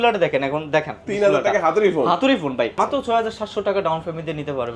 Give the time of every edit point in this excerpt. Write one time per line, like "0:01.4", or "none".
0:02.7